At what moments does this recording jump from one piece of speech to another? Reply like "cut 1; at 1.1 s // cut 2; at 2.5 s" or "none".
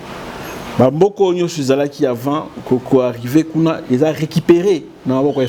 none